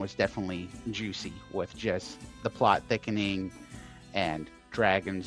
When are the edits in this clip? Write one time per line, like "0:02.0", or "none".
none